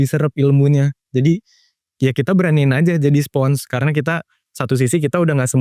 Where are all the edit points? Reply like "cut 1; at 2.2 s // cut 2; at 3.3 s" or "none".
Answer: none